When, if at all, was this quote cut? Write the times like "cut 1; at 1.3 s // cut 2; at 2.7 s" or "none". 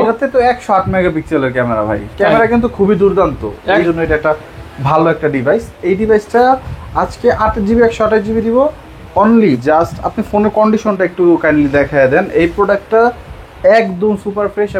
cut 1; at 3.8 s // cut 2; at 9.6 s